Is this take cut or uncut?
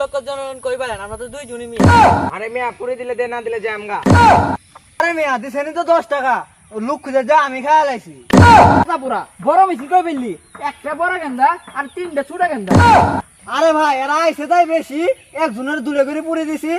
cut